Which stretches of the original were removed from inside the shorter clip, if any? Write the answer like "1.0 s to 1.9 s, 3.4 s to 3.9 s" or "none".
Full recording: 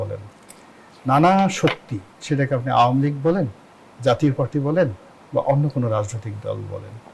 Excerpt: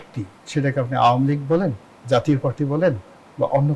3.6 s to 3.8 s